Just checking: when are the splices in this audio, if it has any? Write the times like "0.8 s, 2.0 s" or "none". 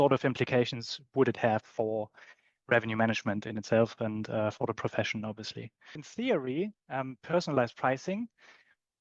6.0 s